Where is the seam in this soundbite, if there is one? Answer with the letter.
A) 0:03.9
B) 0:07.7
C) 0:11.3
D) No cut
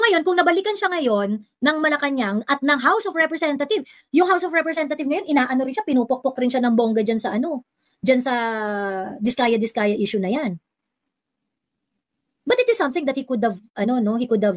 D